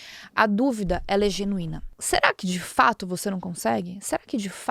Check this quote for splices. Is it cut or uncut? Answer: cut